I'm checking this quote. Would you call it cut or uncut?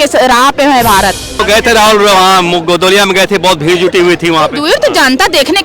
cut